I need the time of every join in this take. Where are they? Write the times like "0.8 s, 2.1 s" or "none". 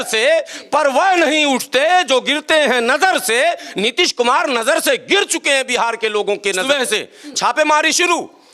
6.6 s

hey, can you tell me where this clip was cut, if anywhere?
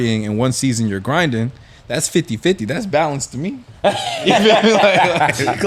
none

